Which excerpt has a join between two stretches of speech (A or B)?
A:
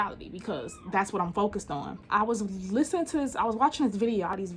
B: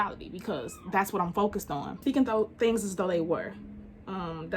B